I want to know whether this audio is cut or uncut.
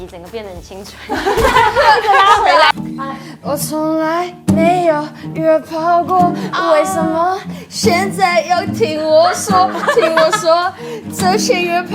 cut